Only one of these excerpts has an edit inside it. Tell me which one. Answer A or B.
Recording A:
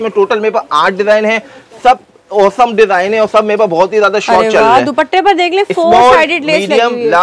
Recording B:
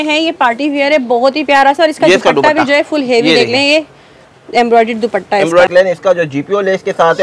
B